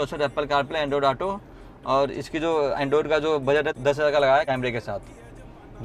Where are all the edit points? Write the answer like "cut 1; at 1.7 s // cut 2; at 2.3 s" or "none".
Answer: cut 1; at 3.7 s // cut 2; at 4.5 s